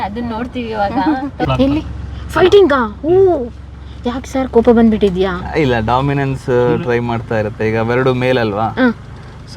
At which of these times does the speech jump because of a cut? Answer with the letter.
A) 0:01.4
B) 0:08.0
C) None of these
A